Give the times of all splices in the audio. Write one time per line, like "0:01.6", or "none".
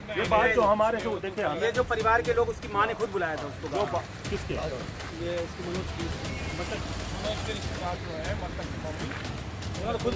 none